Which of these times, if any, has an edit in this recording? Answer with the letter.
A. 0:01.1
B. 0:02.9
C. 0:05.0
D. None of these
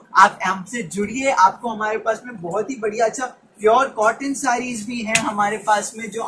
D